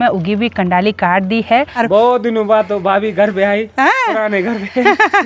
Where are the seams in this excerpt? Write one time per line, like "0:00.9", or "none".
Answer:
0:01.7